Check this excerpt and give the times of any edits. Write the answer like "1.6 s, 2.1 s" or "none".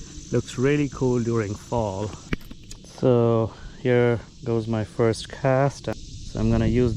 2.2 s